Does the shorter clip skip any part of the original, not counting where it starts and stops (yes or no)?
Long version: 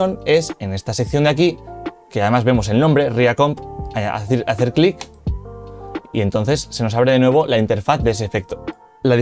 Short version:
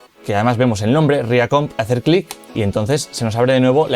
yes